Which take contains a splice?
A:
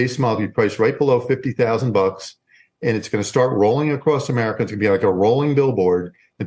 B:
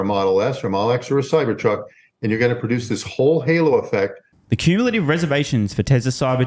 B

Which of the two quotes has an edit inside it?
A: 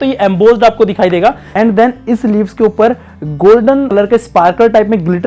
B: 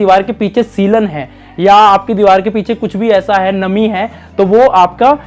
A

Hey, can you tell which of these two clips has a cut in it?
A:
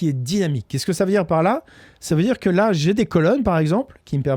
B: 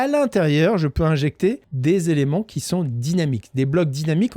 B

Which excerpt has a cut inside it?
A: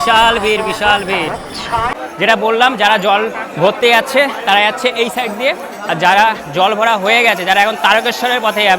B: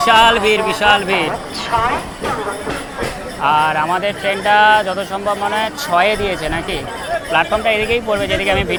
A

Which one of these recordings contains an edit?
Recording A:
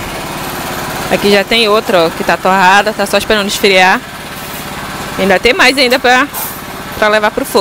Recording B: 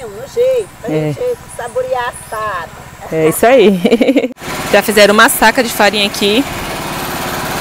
B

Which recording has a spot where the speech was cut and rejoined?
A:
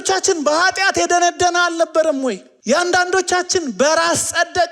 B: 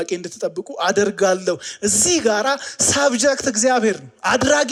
A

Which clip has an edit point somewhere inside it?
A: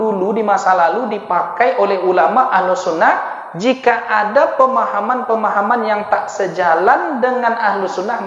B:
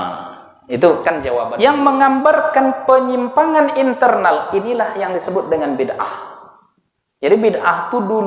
B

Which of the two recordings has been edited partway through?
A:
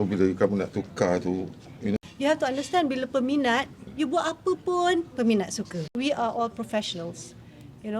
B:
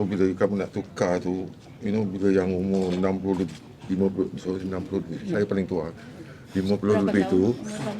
A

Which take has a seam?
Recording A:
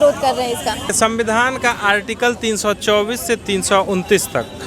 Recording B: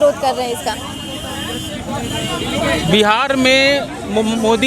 A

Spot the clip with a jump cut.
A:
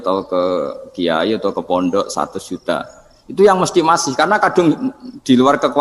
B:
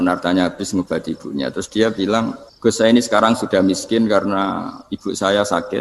B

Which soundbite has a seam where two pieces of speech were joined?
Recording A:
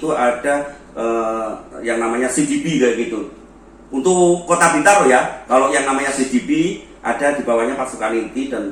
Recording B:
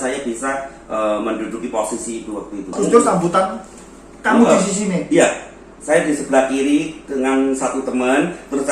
B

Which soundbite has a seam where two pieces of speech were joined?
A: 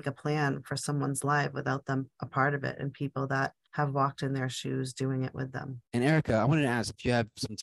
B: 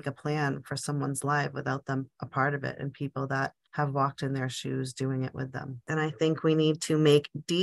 B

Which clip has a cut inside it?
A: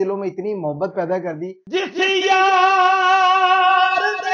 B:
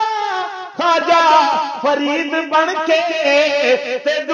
A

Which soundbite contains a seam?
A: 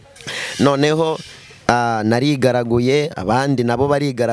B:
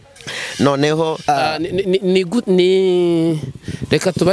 B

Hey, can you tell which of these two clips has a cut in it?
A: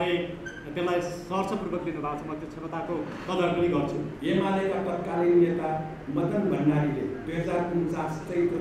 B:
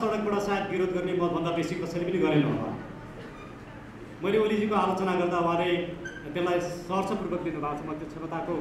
A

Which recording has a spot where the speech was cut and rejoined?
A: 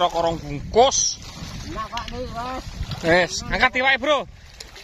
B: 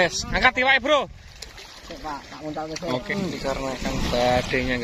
B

